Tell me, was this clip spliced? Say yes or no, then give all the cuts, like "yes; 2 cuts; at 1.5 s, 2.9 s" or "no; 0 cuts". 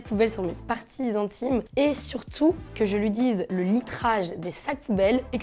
no; 0 cuts